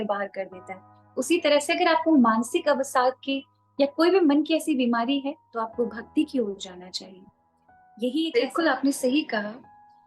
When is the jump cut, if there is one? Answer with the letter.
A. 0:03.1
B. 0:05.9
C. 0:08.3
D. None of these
C